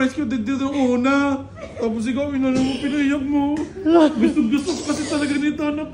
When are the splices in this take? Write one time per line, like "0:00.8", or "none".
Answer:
none